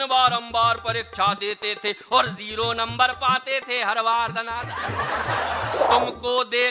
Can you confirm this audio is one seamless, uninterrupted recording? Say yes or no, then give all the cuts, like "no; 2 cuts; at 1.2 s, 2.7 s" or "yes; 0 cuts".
no; 1 cut; at 5.8 s